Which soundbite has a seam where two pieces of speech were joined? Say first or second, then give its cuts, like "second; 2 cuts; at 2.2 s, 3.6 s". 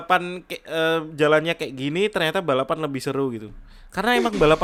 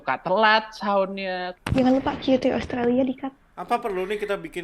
second; 2 cuts; at 1.4 s, 3.5 s